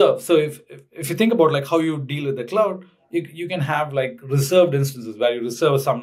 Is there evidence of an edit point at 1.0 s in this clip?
no; 0 cuts

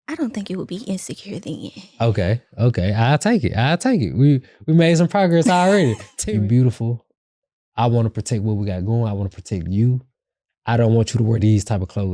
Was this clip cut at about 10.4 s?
no; 1 cut; at 6.1 s

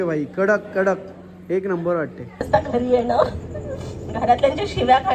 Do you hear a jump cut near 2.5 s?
yes; 1 cut; at 2.5 s

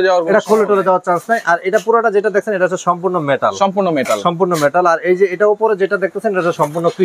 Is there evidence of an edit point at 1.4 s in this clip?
no; 0 cuts

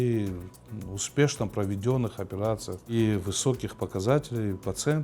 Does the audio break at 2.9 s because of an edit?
yes; 1 cut; at 2.9 s

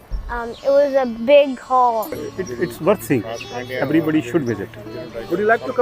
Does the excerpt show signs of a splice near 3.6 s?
no; 1 cut; at 2.2 s

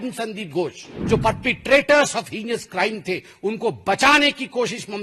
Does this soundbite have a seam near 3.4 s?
no; 1 cut; at 0.9 s

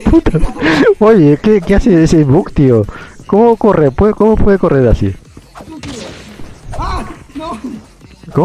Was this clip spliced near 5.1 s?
no; 0 cuts

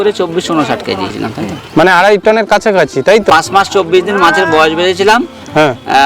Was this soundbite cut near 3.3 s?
yes; 2 cuts; at 1.1 s, 3.3 s

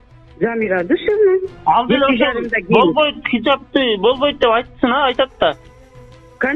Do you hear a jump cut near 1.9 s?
no; 0 cuts

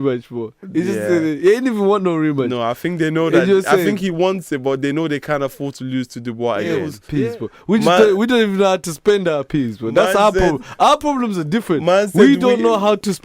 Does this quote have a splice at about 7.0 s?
yes; 1 cut; at 7.0 s

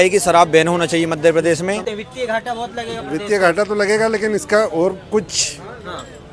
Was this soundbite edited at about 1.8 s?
yes; 1 cut; at 1.8 s

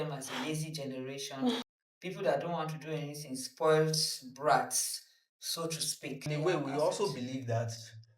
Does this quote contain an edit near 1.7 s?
yes; 2 cuts; at 1.7 s, 6.3 s

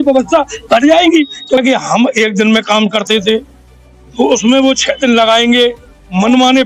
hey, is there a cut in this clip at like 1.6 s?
yes; 1 cut; at 1.6 s

